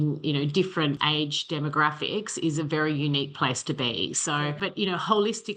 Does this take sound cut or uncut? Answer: uncut